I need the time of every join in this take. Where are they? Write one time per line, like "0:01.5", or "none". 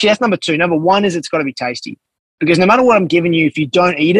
none